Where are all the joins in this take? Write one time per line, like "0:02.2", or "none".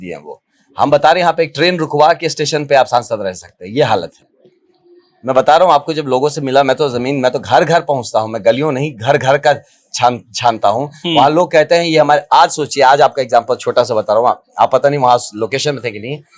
none